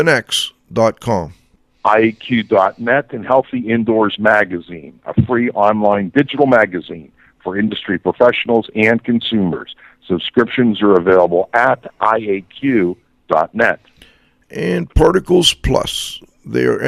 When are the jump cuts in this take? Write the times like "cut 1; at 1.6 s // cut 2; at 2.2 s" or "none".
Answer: cut 1; at 14.1 s